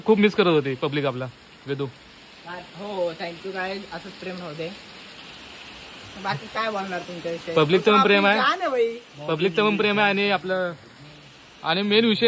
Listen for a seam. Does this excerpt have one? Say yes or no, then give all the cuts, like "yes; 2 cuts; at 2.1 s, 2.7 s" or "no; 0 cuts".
no; 0 cuts